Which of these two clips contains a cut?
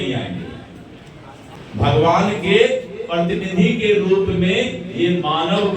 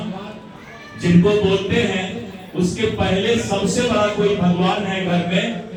first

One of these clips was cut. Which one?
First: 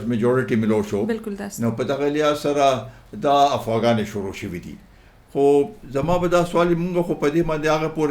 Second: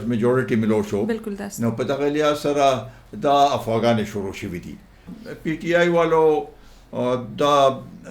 second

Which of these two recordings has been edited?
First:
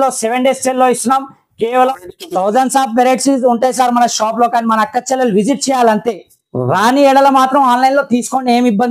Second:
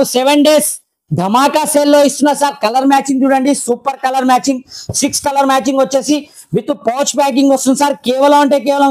first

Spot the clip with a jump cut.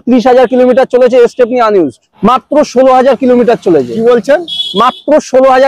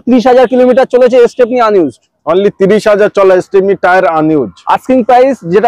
first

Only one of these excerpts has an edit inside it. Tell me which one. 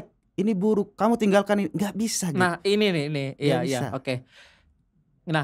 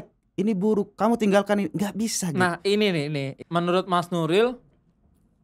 second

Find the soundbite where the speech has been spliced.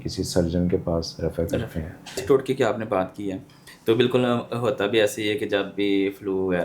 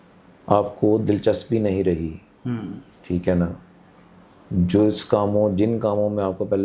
first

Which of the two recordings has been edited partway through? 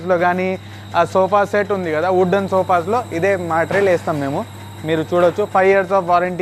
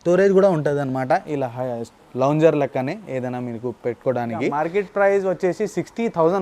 second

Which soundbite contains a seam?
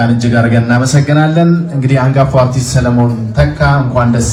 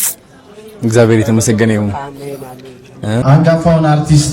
second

